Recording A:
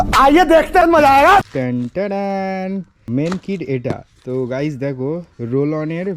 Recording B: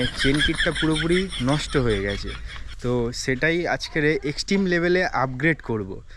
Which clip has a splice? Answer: A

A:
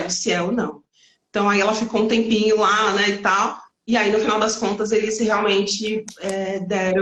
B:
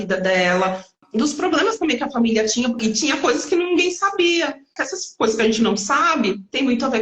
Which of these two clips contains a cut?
B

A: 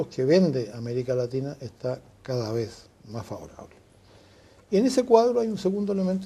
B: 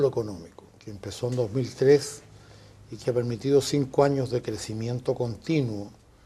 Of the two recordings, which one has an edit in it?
B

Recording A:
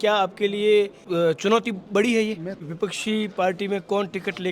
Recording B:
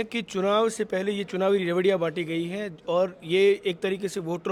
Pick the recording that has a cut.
A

